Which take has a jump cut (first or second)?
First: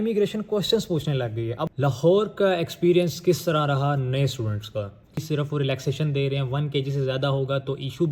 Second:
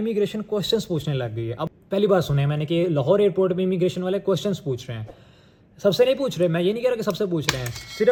first